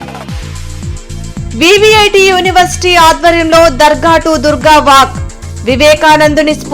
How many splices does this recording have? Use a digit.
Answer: 1